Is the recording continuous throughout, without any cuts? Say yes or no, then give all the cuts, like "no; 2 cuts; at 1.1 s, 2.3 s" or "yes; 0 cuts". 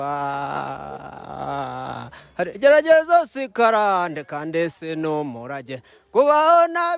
yes; 0 cuts